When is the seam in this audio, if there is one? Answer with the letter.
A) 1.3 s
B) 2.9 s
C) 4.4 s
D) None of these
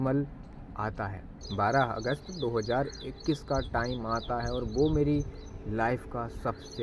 A